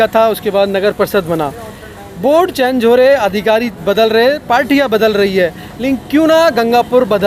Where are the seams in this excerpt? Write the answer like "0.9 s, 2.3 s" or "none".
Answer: none